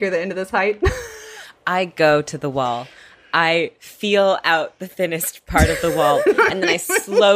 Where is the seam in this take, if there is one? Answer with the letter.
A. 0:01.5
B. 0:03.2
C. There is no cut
A